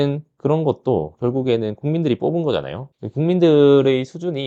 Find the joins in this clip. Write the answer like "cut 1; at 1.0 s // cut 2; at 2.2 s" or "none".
none